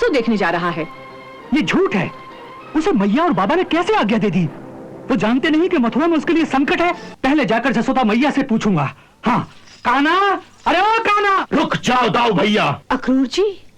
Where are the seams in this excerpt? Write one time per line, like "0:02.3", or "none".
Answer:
0:07.1
0:11.4
0:12.8